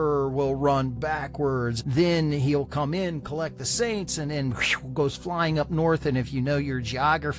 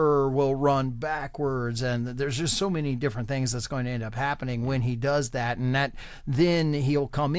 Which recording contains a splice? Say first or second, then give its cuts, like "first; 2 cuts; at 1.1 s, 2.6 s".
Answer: first; 1 cut; at 1.8 s